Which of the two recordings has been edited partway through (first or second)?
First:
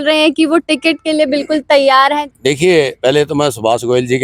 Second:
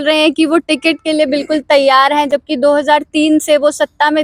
first